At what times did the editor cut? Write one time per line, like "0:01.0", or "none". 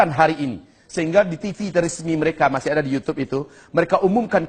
none